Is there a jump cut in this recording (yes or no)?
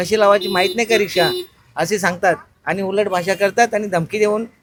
no